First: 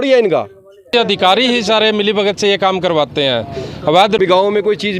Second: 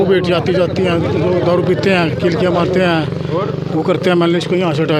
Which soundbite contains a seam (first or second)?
first